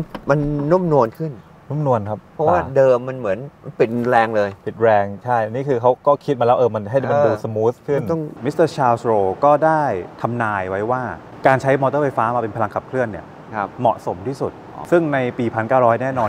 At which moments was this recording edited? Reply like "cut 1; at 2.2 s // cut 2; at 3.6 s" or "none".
cut 1; at 8.4 s // cut 2; at 14.7 s